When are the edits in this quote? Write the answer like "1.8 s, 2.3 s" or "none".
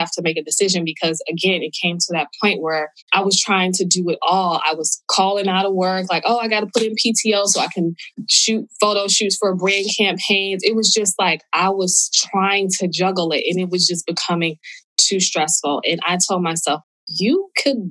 16.8 s